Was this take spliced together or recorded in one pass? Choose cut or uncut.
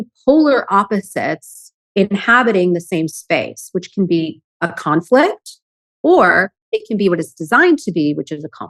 uncut